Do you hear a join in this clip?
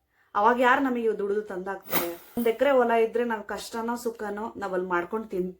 yes; 1 cut; at 2.4 s

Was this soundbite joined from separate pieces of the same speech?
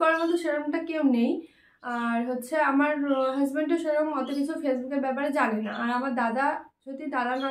no; 0 cuts

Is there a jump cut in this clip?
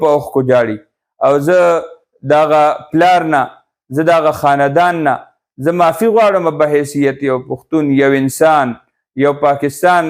no; 0 cuts

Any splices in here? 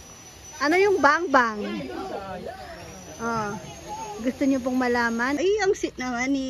yes; 1 cut; at 5.4 s

